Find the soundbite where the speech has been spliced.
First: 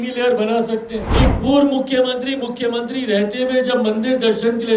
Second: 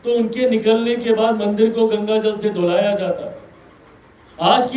first; 1 cut; at 1.2 s

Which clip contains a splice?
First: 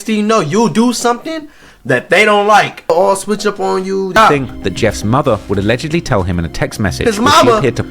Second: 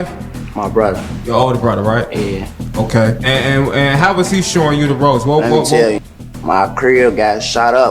first; 2 cuts; at 2.9 s, 4.2 s

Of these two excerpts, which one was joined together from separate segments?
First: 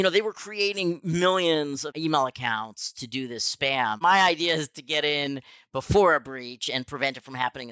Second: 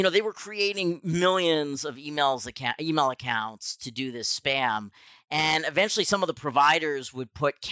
first; 2 cuts; at 1.9 s, 4.0 s

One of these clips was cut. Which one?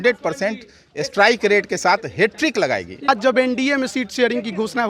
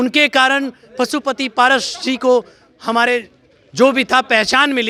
first; 1 cut; at 3.1 s

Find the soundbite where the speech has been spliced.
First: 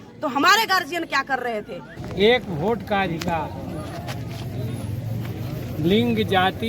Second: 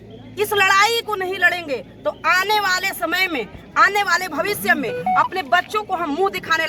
first; 1 cut; at 1.9 s

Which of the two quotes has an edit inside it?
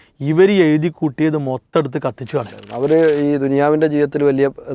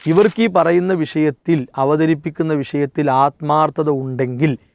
first; 1 cut; at 2.6 s

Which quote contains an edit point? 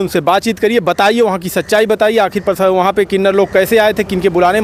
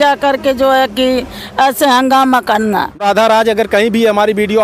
second; 1 cut; at 3.0 s

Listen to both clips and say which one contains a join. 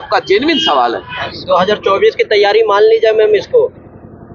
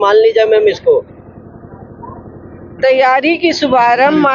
first; 1 cut; at 1.1 s

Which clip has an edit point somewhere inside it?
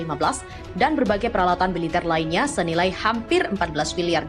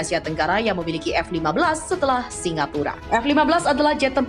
second; 1 cut; at 3.0 s

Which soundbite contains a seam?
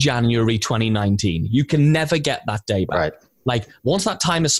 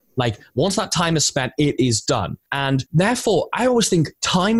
second; 1 cut; at 2.7 s

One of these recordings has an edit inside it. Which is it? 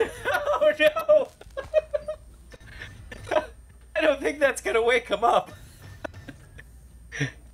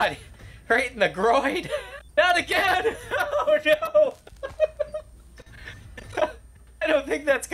second; 1 cut; at 2.0 s

